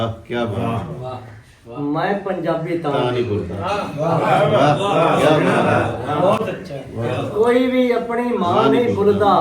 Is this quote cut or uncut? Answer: uncut